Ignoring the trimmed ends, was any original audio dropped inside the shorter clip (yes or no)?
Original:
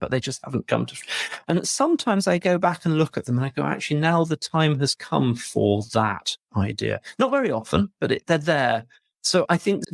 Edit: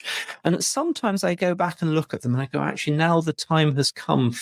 no